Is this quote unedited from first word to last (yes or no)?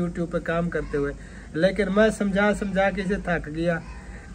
yes